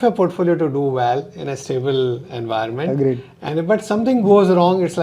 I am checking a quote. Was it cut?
no; 0 cuts

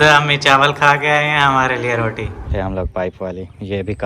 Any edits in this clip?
yes; 1 cut; at 2.5 s

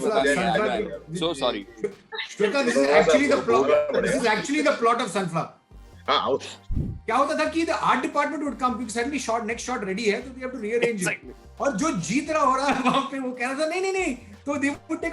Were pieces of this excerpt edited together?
yes; 1 cut; at 6.6 s

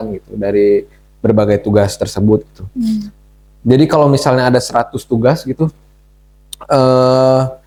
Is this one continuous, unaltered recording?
yes; 0 cuts

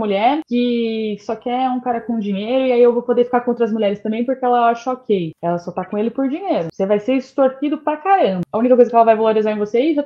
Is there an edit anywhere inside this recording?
yes; 1 cut; at 8.5 s

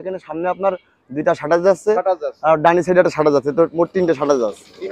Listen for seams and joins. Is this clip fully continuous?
no; 1 cut; at 1.3 s

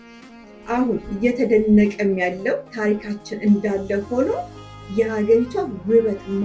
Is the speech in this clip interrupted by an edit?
no; 0 cuts

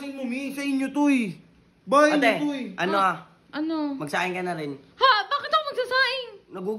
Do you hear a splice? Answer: no; 0 cuts

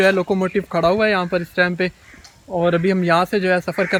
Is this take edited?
no; 0 cuts

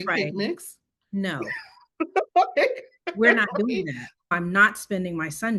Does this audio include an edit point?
yes; 1 cut; at 4.3 s

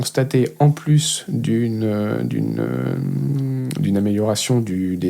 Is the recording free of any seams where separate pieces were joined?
yes; 0 cuts

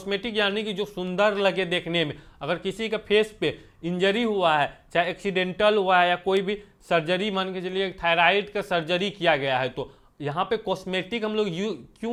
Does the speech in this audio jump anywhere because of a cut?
no; 0 cuts

